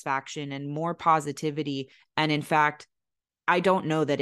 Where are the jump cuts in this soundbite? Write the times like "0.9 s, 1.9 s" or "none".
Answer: 2.0 s